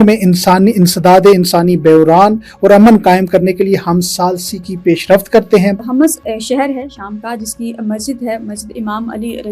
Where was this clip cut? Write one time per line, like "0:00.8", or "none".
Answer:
0:05.8

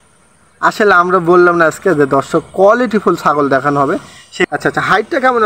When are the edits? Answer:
0:04.4

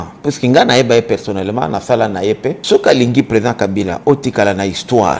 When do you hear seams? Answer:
0:02.6

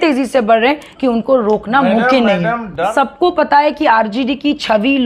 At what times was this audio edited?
0:02.9

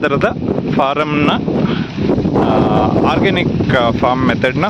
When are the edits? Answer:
none

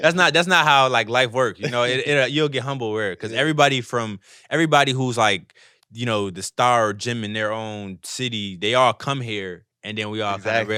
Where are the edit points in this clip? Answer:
none

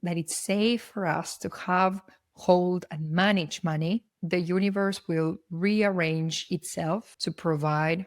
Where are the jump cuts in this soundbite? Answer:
0:07.1

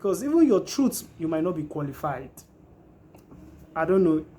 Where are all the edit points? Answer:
none

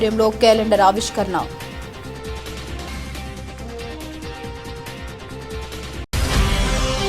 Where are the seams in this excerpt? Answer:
0:01.6
0:06.0

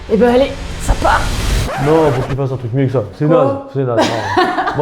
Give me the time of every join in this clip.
0:01.5

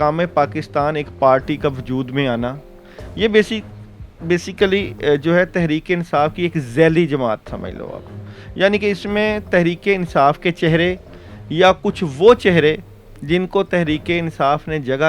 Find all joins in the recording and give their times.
none

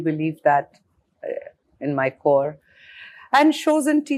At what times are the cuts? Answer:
none

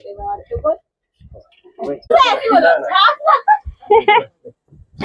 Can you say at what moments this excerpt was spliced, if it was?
0:02.1

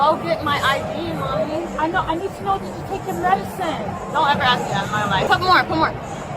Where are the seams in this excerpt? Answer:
0:05.3

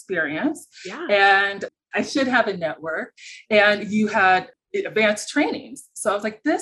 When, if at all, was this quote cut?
0:01.8

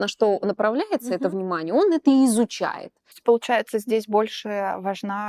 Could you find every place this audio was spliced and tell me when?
0:03.2

